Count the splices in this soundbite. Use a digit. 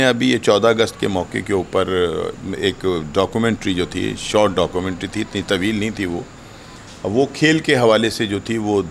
0